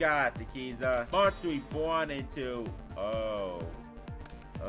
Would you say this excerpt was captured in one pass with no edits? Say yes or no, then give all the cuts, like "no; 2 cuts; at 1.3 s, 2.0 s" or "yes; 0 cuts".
no; 1 cut; at 1.1 s